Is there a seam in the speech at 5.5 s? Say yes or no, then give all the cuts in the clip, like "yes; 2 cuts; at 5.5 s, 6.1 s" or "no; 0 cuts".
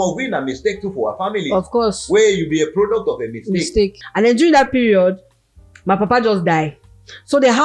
no; 1 cut; at 4.0 s